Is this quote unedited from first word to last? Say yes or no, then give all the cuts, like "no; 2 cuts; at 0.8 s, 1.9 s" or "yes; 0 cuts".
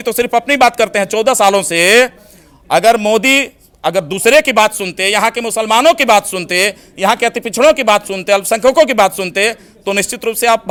yes; 0 cuts